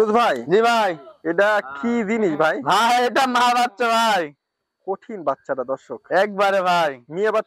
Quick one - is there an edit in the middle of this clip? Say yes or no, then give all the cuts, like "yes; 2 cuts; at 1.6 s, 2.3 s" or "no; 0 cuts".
no; 0 cuts